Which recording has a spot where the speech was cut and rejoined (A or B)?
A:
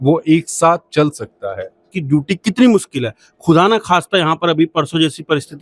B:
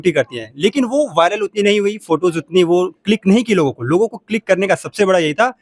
A